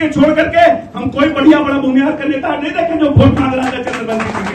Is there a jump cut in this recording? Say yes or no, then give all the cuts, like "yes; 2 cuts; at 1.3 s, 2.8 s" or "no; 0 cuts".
no; 0 cuts